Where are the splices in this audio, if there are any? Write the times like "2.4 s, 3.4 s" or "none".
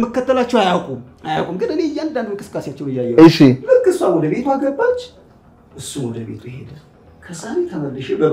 none